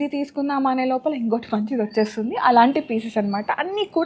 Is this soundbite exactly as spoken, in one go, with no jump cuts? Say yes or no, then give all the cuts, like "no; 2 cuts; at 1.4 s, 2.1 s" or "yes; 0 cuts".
yes; 0 cuts